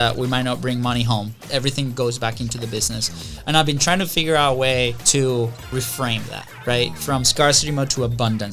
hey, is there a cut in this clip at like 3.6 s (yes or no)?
no